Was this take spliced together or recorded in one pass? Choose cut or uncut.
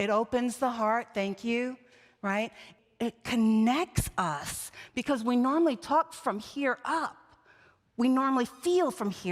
cut